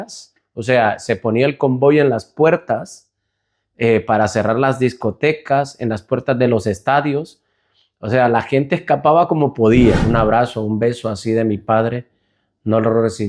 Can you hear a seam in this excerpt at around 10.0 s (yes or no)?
yes